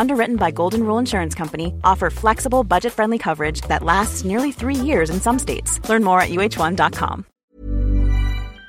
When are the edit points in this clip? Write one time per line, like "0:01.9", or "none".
0:07.3